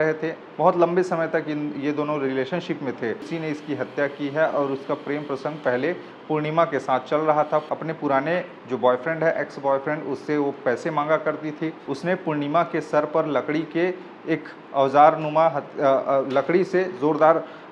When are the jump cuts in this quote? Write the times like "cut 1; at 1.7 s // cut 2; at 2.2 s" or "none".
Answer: cut 1; at 3.3 s // cut 2; at 7.7 s // cut 3; at 11.8 s